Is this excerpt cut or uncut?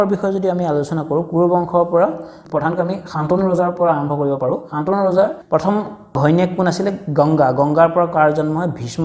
uncut